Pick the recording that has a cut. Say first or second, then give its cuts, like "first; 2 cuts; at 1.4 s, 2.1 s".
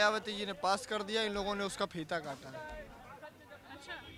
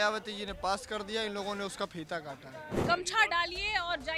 second; 1 cut; at 2.7 s